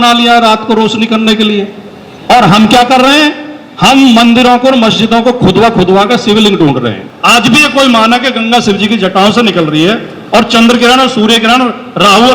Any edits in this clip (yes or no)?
yes